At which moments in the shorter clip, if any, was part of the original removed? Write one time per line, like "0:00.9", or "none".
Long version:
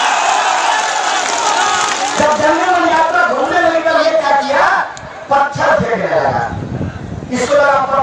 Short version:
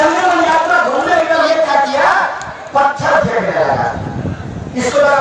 0:01.2